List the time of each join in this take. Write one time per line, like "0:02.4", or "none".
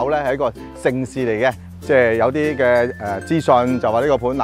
0:01.7